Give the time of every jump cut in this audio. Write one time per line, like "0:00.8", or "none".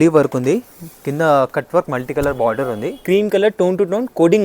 0:03.0

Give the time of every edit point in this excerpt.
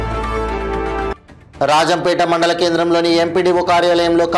0:01.1

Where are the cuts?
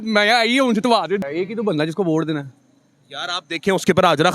0:01.2

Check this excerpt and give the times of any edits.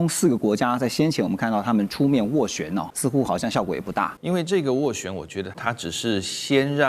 0:02.9
0:04.2
0:05.5

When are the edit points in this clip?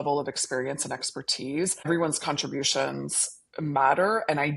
0:01.9

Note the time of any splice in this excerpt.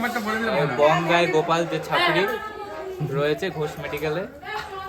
none

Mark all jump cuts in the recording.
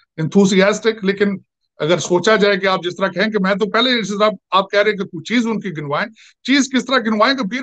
none

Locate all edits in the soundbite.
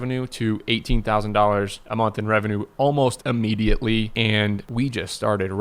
0:04.7

